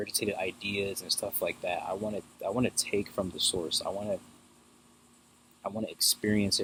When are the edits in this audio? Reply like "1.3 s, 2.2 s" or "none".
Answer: none